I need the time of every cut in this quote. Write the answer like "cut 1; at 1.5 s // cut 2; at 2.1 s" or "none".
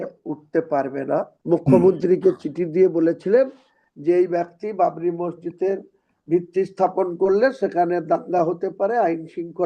cut 1; at 1.4 s